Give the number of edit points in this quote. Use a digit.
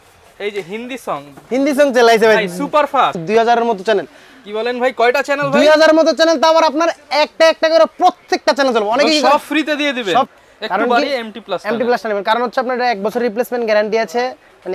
2